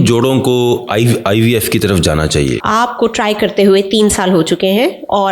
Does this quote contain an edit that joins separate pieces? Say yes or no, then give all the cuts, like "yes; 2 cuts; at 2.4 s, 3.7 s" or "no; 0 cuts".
yes; 1 cut; at 2.6 s